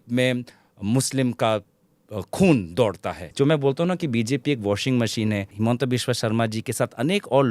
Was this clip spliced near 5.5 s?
yes; 2 cuts; at 3.3 s, 5.5 s

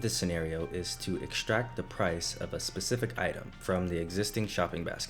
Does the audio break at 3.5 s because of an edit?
yes; 1 cut; at 3.5 s

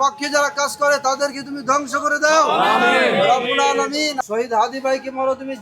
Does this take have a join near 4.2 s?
yes; 1 cut; at 4.2 s

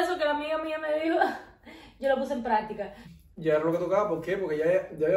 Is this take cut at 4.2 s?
no; 1 cut; at 3.0 s

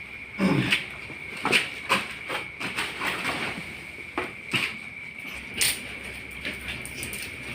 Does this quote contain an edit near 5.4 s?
yes; 1 cut; at 5.4 s

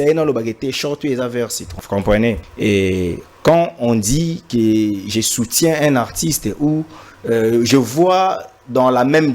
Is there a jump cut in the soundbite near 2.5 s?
yes; 2 cuts; at 1.7 s, 2.5 s

